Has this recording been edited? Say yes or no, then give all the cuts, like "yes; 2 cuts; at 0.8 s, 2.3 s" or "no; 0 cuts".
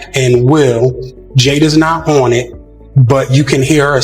no; 0 cuts